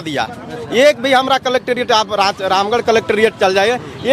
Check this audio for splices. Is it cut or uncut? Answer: uncut